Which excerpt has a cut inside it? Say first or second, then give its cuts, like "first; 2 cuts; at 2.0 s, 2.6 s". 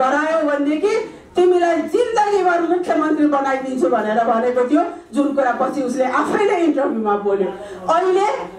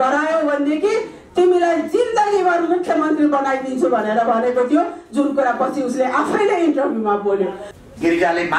second; 1 cut; at 7.7 s